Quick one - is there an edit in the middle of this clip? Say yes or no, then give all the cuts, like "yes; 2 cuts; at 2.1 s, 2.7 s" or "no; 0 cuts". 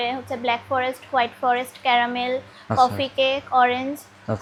no; 0 cuts